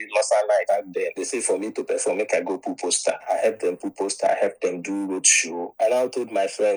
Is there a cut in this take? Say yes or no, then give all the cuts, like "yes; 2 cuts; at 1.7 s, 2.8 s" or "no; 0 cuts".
no; 0 cuts